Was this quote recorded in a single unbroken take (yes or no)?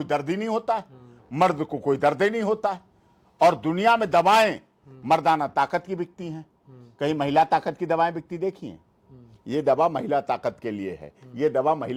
yes